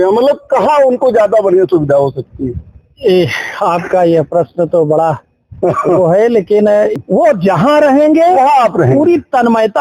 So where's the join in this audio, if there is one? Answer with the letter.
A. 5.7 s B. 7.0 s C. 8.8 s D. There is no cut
B